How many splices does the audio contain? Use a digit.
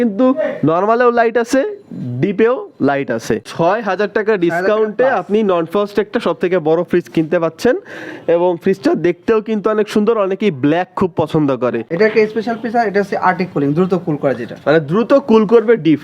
2